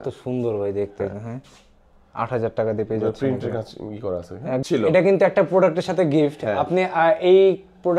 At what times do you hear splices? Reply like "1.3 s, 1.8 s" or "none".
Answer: 4.6 s